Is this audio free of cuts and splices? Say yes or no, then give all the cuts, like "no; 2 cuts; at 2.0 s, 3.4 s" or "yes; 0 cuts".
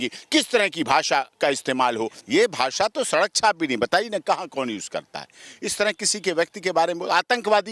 no; 1 cut; at 2.2 s